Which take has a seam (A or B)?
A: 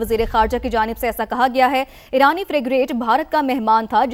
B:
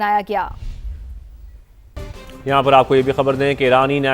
B